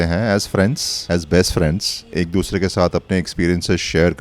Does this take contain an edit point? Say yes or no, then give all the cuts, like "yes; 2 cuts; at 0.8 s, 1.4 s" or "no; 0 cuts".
yes; 2 cuts; at 0.9 s, 2.1 s